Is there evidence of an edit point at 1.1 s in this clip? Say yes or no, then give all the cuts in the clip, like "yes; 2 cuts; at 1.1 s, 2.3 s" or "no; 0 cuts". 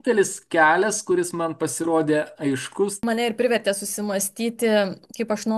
no; 1 cut; at 3.0 s